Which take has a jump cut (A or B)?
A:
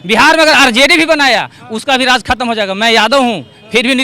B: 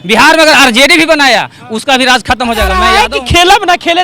B